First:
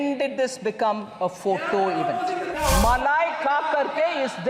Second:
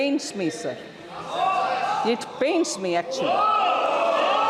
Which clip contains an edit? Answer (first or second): first